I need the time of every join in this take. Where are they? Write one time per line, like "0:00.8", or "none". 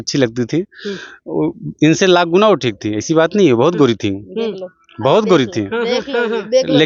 none